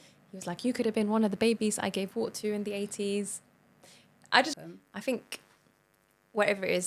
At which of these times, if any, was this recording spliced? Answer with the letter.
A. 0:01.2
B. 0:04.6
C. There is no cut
B